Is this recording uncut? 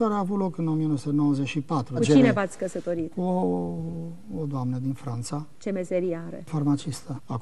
no; 1 cut; at 1.2 s

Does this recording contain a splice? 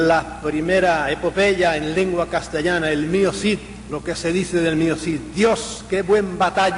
yes; 1 cut; at 1.9 s

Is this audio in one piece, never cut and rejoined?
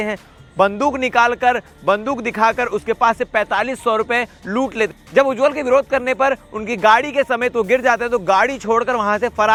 yes; 0 cuts

